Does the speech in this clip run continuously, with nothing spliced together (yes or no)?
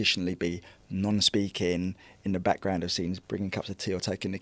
no